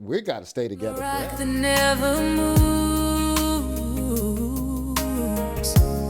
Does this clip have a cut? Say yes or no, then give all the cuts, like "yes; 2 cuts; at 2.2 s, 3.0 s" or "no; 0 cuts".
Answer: yes; 1 cut; at 1.0 s